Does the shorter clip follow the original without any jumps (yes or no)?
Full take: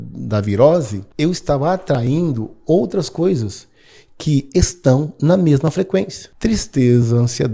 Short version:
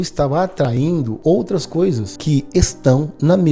no